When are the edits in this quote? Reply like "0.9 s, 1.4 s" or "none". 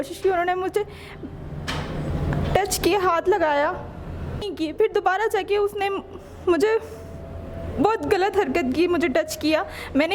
4.5 s